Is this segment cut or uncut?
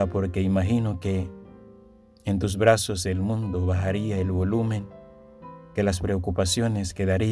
uncut